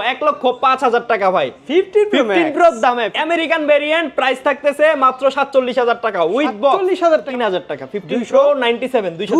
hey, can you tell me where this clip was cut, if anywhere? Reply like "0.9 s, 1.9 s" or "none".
3.1 s, 7.3 s